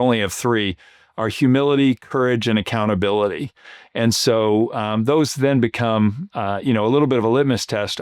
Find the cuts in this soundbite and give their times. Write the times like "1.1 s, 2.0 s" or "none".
none